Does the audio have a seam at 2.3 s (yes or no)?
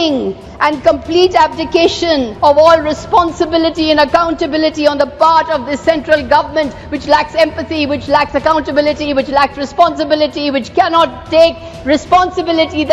yes